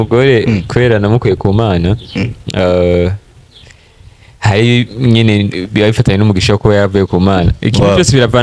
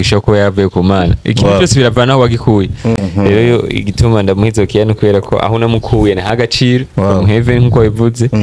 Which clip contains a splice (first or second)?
second